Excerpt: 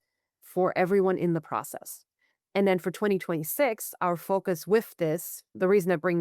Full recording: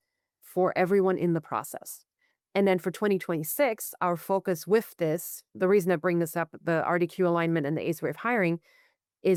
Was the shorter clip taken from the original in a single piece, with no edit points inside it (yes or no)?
yes